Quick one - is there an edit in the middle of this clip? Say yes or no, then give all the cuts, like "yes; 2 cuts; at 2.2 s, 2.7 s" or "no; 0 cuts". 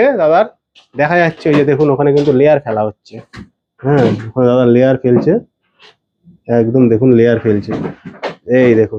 no; 0 cuts